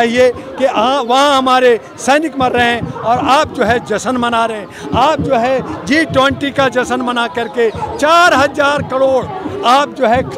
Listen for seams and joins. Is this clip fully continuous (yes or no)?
yes